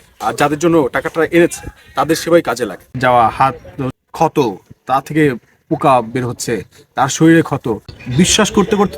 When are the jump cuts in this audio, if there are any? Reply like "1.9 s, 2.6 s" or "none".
2.9 s, 7.9 s